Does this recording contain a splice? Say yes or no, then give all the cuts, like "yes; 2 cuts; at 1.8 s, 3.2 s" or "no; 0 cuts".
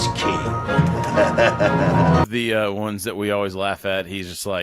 yes; 1 cut; at 2.2 s